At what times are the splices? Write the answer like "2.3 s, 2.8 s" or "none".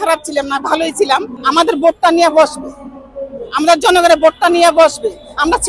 1.3 s